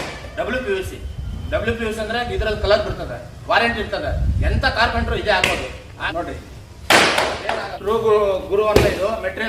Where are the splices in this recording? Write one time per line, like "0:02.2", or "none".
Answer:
0:06.0
0:07.7

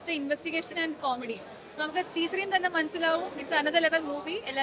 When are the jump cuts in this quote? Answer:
none

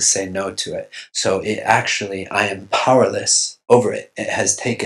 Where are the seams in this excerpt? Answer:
0:01.0

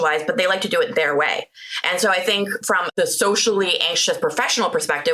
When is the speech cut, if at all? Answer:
0:02.9

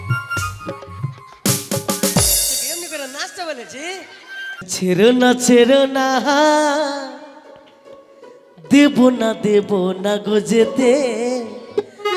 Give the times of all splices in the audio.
0:04.7

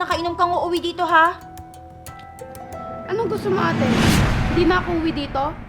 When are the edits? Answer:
none

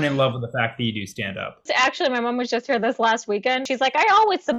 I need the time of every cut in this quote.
0:01.7
0:03.6

